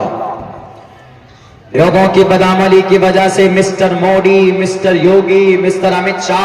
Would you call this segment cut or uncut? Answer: cut